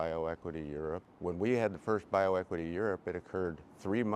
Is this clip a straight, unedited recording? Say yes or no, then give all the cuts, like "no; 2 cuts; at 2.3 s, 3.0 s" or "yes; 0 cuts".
no; 1 cut; at 1.1 s